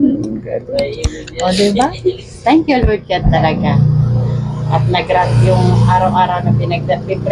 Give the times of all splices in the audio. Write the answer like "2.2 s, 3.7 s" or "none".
none